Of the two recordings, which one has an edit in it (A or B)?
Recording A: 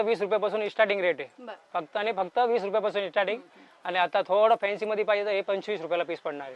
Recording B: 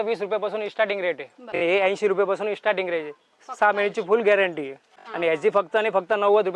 B